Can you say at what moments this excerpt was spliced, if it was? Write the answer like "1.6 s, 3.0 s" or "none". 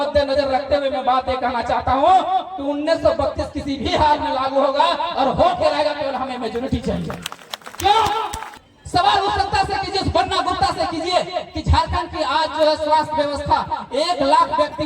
8.4 s